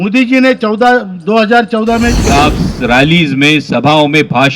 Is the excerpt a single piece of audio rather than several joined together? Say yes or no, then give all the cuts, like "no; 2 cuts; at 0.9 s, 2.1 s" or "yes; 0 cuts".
no; 1 cut; at 2.3 s